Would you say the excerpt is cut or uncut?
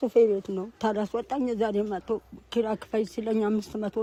uncut